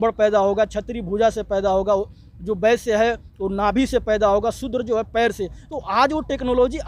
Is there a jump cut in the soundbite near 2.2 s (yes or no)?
no